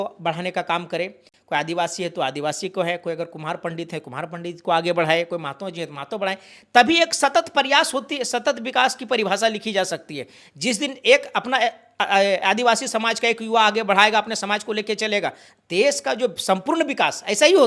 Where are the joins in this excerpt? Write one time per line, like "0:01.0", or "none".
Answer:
none